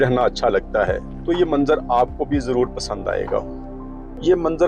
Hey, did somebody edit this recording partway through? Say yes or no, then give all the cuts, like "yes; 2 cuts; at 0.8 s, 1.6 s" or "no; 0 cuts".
no; 0 cuts